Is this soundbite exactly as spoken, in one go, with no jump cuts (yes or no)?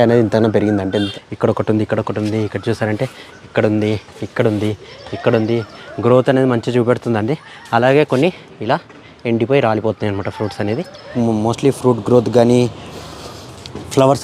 no